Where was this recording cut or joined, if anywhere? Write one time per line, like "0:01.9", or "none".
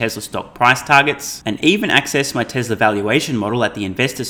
none